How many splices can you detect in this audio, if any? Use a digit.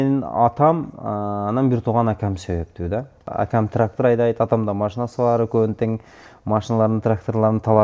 1